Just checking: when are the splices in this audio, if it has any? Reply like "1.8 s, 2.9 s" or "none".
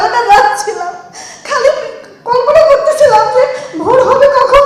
none